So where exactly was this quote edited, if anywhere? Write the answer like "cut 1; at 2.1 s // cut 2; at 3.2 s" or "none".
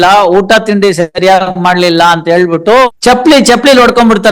cut 1; at 3.0 s